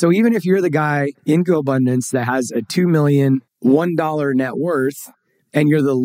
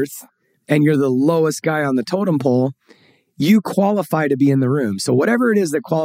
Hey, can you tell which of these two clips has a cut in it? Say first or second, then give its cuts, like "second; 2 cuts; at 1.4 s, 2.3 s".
first; 2 cuts; at 1.1 s, 3.5 s